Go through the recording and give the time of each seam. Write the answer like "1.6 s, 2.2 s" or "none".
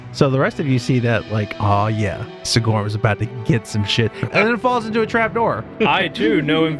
4.2 s, 5.8 s